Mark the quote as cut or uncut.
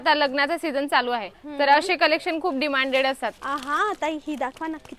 cut